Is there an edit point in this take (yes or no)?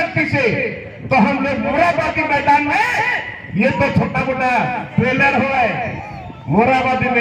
no